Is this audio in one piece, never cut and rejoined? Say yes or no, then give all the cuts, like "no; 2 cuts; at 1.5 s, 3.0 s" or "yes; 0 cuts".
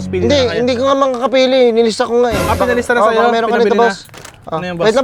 yes; 0 cuts